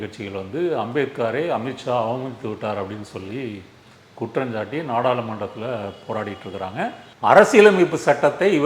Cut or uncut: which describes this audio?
cut